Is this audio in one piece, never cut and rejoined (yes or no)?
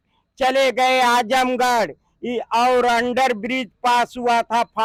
yes